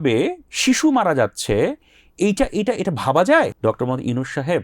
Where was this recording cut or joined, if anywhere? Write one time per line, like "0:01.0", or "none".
0:03.5